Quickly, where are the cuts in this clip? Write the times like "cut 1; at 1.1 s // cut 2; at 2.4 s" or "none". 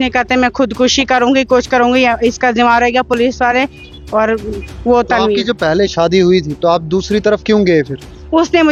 none

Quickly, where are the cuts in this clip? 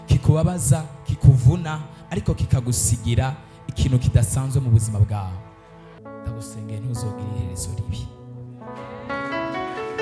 cut 1; at 6.0 s

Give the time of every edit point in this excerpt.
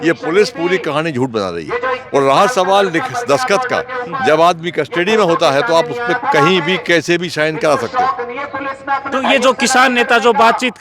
none

